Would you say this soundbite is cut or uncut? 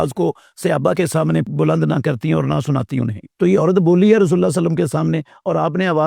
cut